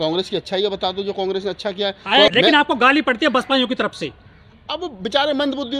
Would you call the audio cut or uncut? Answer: cut